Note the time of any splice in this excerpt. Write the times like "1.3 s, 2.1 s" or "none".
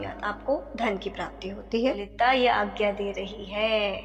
2.1 s